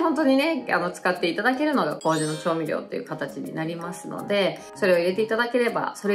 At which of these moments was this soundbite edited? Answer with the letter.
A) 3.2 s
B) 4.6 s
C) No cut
C